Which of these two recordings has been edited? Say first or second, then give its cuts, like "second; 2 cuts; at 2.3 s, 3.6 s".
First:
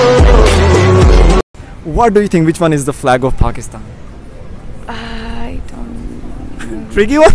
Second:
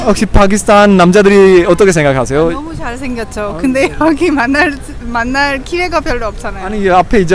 first; 1 cut; at 1.5 s